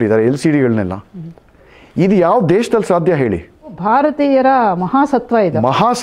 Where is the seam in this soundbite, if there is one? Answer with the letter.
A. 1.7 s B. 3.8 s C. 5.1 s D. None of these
B